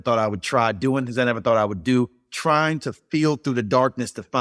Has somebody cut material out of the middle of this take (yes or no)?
no